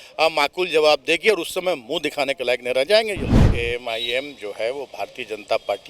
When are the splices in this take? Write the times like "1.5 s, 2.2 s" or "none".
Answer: 3.5 s